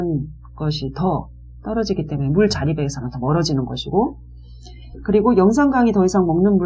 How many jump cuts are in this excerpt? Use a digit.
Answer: 0